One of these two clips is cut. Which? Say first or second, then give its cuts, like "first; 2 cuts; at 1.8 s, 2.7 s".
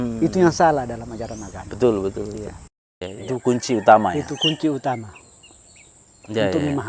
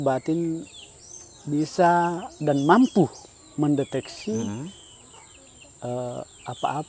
first; 1 cut; at 3.1 s